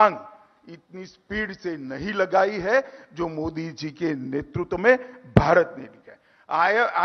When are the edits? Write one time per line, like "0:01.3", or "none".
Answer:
none